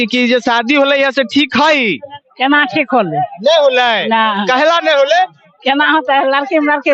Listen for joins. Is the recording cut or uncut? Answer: uncut